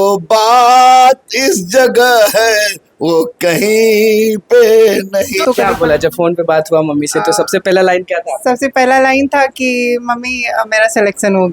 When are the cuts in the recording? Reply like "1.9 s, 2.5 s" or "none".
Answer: 5.4 s